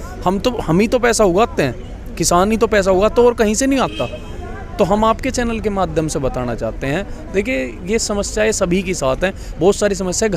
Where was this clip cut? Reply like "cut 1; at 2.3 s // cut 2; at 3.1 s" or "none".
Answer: none